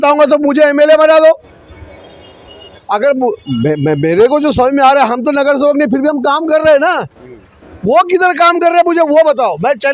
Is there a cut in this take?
no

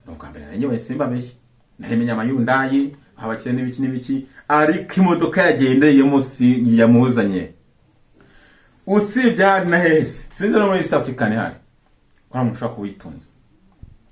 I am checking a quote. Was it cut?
no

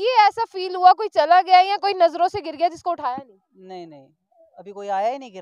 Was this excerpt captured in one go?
yes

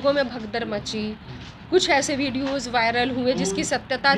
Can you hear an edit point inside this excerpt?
no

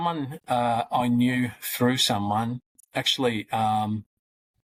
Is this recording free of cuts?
yes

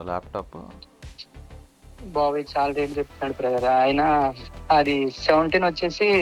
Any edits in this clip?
yes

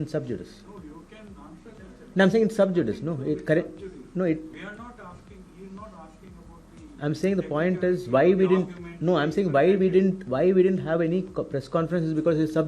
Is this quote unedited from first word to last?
yes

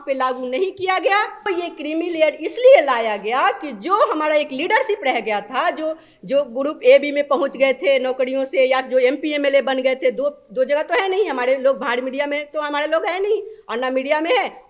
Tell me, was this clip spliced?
yes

